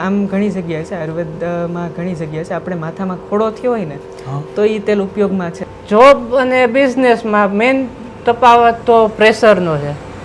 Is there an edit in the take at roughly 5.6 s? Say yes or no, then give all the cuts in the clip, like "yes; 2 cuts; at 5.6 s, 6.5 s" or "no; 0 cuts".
yes; 1 cut; at 5.6 s